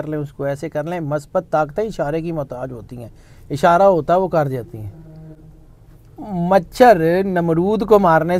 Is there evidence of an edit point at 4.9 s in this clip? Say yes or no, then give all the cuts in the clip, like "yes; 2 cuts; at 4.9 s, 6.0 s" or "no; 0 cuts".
no; 0 cuts